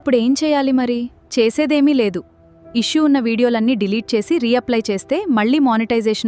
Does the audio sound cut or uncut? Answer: uncut